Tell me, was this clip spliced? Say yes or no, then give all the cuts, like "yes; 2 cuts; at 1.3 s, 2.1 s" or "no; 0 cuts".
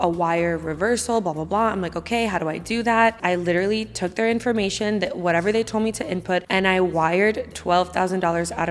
yes; 2 cuts; at 3.2 s, 6.5 s